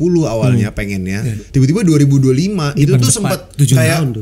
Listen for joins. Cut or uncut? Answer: cut